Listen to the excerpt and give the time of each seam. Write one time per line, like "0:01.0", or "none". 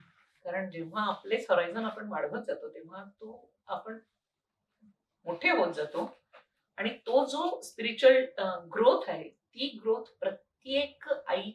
none